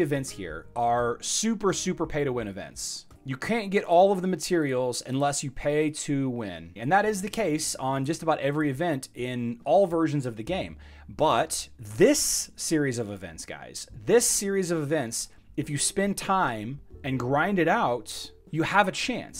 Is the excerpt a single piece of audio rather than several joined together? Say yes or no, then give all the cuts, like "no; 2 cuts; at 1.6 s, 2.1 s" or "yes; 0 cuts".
yes; 0 cuts